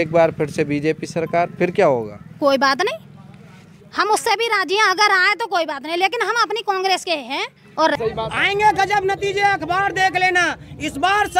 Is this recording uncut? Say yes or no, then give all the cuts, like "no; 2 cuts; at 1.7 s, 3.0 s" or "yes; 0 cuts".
no; 1 cut; at 8.0 s